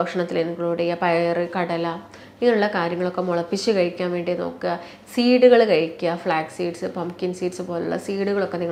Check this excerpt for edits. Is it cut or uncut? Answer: uncut